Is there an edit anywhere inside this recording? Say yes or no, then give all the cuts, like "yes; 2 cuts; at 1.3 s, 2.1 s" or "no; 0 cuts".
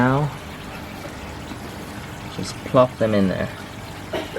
no; 0 cuts